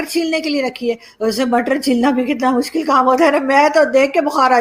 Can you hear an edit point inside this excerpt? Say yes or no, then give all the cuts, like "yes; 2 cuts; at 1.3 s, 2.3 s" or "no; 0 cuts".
no; 0 cuts